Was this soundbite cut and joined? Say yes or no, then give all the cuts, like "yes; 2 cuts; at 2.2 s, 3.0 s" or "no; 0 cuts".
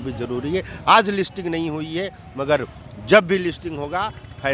no; 0 cuts